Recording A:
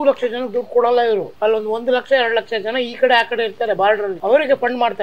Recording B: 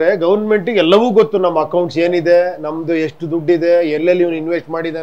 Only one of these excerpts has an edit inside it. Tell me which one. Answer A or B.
A